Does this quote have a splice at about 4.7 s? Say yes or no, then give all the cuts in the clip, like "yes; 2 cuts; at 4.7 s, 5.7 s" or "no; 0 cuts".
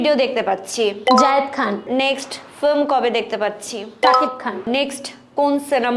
yes; 2 cuts; at 1.8 s, 4.7 s